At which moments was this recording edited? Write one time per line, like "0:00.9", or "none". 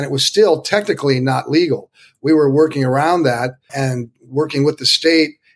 0:03.6